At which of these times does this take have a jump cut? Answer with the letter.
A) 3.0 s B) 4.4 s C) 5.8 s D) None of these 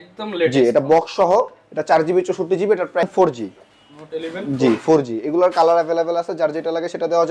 A